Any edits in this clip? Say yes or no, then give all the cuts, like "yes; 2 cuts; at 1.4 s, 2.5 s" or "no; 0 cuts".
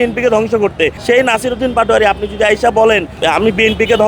yes; 2 cuts; at 1.0 s, 3.1 s